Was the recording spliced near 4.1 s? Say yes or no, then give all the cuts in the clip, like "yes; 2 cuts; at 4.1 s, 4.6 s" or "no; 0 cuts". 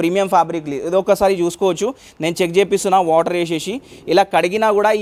no; 0 cuts